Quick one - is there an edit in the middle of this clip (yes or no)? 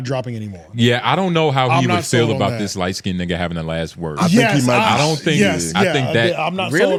no